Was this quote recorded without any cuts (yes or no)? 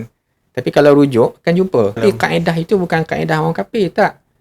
no